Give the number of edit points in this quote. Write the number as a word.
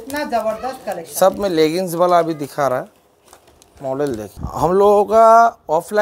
one